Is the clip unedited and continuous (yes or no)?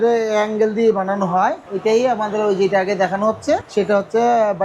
no